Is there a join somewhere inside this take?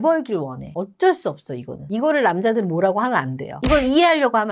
no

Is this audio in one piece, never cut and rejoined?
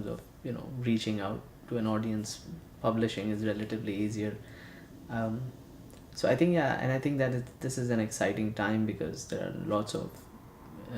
no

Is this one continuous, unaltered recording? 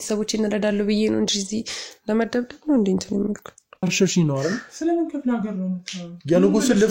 no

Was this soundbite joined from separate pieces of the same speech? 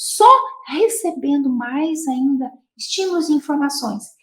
no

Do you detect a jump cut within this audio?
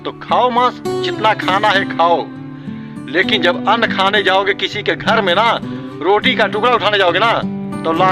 no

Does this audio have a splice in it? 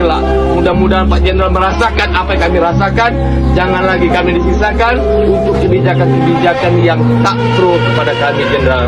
no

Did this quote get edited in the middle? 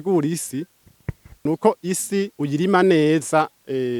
yes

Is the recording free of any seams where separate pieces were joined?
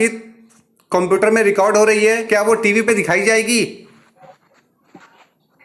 no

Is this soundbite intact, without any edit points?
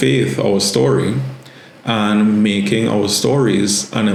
yes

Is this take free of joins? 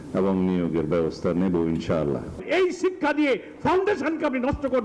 no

